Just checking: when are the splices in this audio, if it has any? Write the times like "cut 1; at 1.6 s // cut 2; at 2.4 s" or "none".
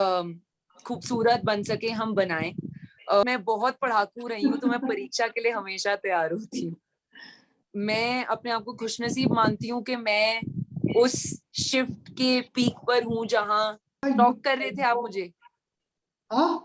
cut 1; at 3.2 s // cut 2; at 7.6 s // cut 3; at 14.0 s